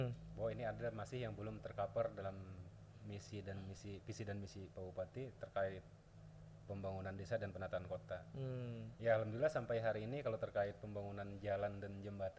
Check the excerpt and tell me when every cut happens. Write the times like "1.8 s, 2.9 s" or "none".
none